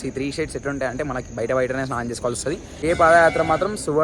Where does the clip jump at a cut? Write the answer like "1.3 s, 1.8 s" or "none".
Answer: 2.8 s